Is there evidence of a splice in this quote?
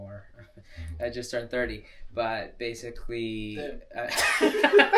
no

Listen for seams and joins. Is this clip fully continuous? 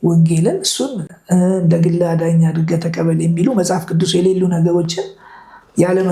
yes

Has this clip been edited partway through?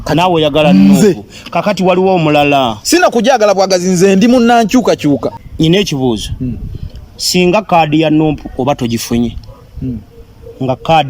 yes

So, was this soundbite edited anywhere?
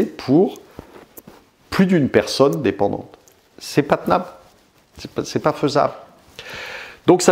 no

